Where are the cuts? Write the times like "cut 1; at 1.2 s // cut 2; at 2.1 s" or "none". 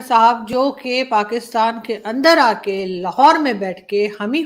none